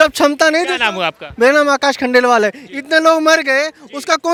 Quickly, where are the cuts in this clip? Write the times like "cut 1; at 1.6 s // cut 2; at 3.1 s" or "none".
none